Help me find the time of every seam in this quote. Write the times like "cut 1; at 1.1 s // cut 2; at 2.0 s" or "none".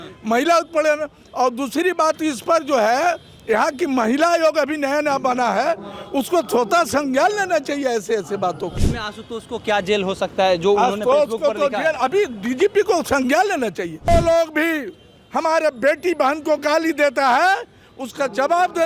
cut 1; at 8.8 s // cut 2; at 14.1 s